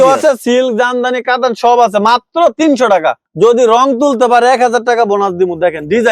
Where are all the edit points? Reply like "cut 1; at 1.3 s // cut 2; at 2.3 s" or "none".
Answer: cut 1; at 3.2 s